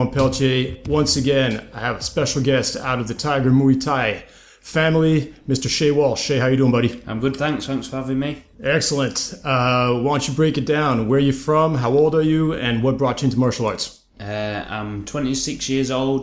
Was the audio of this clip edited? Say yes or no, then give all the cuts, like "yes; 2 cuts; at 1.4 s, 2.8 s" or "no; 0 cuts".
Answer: no; 0 cuts